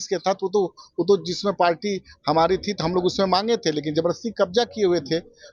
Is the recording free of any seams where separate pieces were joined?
yes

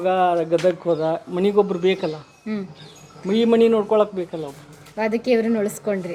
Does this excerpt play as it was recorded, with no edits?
yes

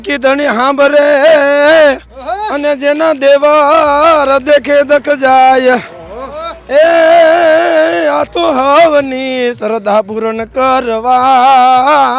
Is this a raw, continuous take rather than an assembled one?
yes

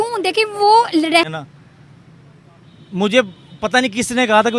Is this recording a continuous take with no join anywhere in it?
no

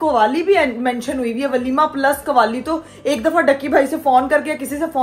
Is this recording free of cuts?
yes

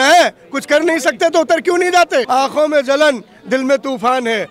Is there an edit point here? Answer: yes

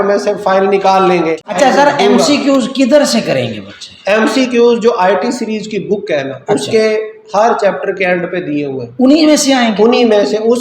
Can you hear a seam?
yes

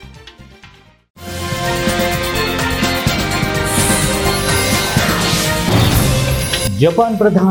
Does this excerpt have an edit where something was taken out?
no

